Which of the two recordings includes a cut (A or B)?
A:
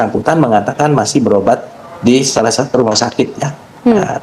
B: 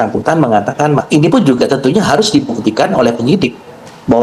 B